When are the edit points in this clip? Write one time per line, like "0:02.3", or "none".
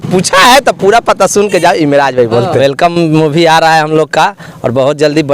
0:02.6